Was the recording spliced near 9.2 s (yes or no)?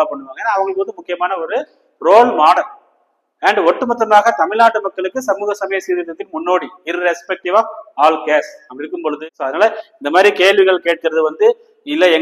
yes